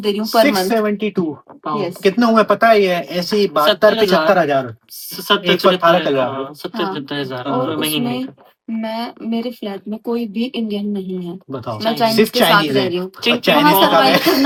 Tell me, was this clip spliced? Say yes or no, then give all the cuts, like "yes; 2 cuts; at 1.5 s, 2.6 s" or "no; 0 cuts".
no; 0 cuts